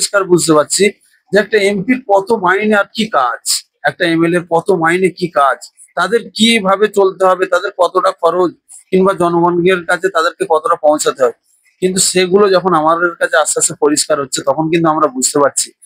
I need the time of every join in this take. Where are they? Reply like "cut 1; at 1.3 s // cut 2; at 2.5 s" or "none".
none